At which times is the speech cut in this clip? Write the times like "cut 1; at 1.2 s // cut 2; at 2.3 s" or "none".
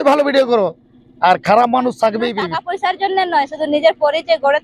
cut 1; at 2.5 s

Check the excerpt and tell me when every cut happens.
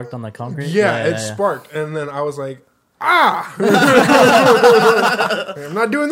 none

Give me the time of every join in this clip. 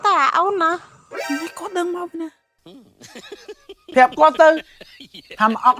cut 1; at 3.9 s

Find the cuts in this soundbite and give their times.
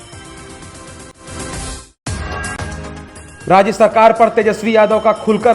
none

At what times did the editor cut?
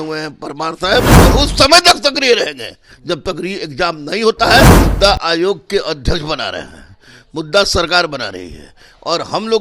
cut 1; at 1.1 s // cut 2; at 4.8 s

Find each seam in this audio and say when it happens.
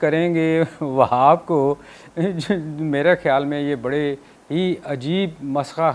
none

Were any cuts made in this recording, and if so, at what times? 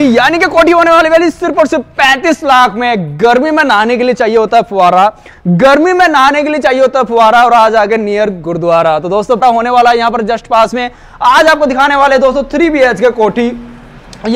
cut 1; at 9.4 s

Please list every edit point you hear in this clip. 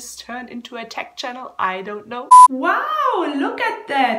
none

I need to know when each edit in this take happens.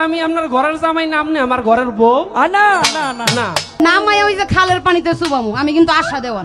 cut 1; at 3.8 s

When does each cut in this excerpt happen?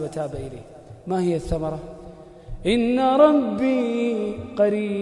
none

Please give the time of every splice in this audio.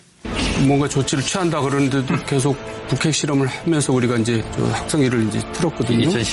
cut 1; at 2.0 s

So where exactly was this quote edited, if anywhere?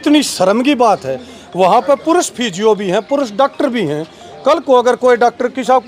none

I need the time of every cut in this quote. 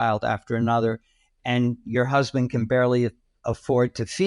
cut 1; at 3.3 s

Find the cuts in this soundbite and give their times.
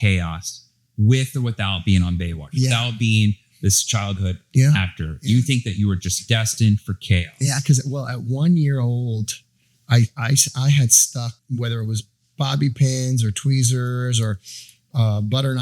cut 1; at 11.4 s

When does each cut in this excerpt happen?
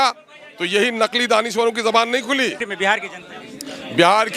cut 1; at 2.6 s

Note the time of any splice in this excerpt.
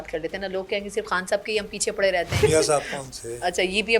cut 1; at 2.4 s

